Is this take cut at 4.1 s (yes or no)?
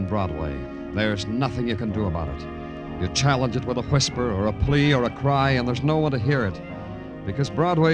yes